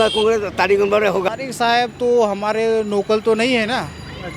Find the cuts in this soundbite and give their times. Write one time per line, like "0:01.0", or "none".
0:01.3